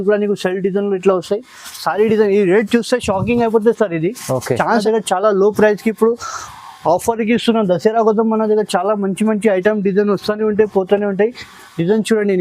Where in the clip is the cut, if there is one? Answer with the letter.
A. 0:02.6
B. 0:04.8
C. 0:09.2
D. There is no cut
B